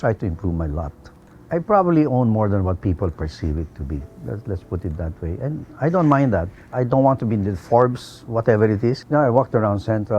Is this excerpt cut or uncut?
cut